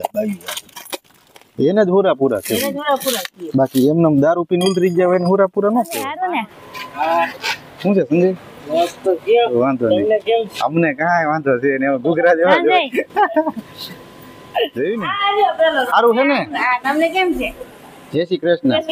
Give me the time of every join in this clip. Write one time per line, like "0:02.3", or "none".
0:06.2
0:15.1